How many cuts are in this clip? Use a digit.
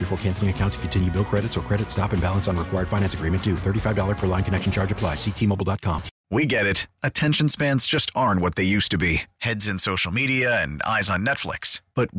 1